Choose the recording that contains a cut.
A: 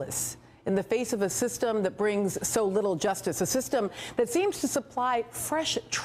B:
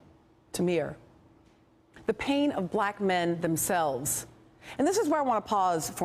A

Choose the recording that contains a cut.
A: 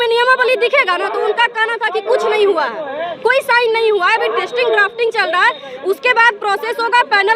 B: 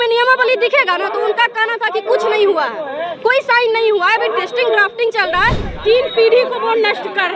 B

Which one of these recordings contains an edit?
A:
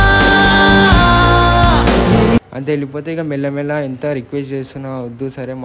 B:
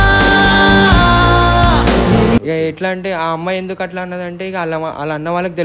A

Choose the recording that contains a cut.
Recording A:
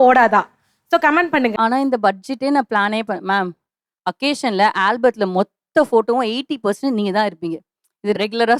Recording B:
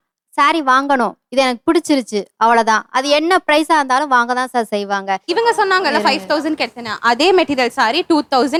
A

